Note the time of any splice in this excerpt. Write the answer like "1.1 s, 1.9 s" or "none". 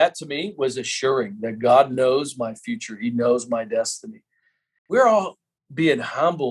4.9 s